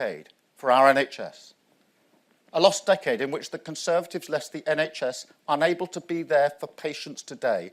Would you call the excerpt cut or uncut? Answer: uncut